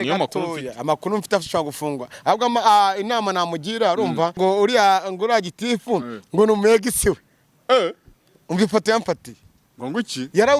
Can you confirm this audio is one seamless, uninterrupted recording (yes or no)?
no